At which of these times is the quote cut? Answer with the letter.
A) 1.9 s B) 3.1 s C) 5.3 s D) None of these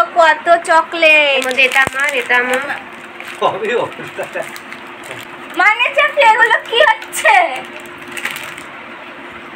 C